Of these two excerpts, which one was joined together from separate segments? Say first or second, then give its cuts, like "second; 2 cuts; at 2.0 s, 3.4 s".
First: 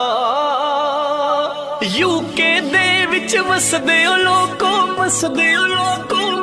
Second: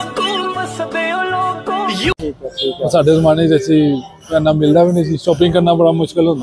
second; 1 cut; at 2.1 s